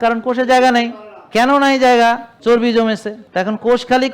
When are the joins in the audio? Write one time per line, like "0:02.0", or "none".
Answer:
0:01.3
0:02.3
0:03.2

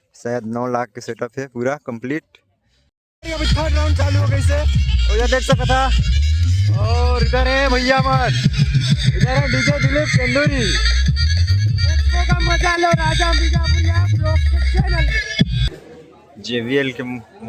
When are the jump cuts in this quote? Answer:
0:03.0
0:15.8

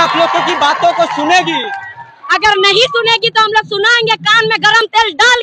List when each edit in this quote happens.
none

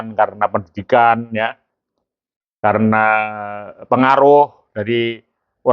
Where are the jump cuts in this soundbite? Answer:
none

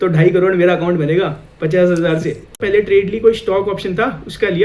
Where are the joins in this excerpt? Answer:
0:02.6

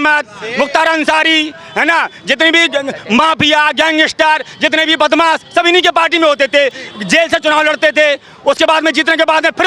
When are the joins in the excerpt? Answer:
none

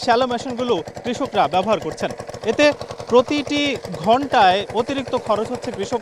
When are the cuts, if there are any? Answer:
0:02.3

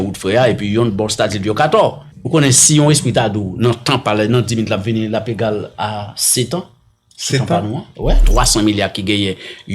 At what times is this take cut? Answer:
0:02.1
0:08.2

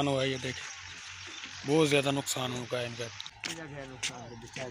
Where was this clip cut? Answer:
0:03.3

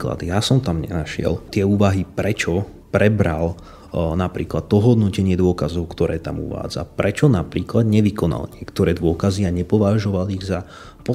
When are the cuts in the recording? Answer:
0:01.5

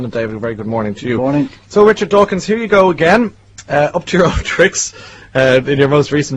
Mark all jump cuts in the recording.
0:01.6

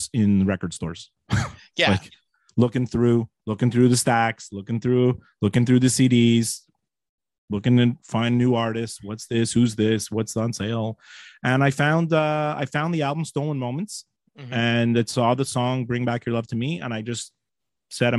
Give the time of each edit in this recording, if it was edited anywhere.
none

